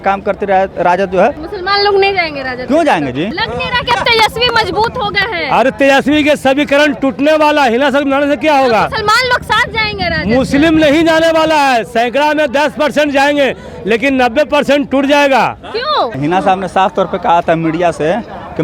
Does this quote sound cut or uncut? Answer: cut